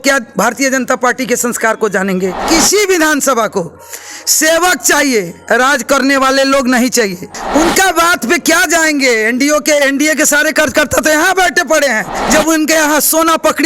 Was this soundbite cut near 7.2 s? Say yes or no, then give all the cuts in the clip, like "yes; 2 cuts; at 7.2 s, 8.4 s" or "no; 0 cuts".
yes; 3 cuts; at 2.4 s, 7.2 s, 12.1 s